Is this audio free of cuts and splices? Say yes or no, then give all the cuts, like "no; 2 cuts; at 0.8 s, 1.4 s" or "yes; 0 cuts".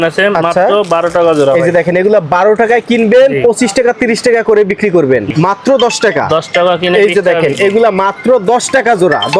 no; 1 cut; at 5.3 s